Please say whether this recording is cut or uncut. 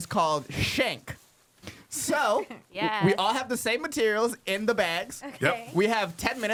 uncut